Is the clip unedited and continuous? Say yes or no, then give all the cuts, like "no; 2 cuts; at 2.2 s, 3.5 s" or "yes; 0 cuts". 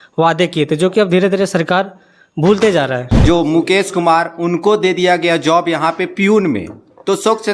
no; 1 cut; at 3.1 s